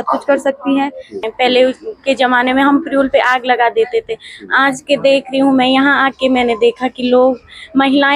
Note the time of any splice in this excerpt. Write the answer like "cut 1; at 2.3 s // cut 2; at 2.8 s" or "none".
cut 1; at 1.1 s